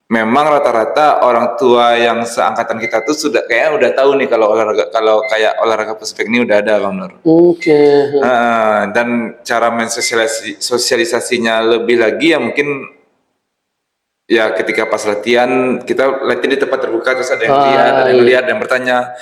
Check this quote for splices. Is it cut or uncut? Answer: uncut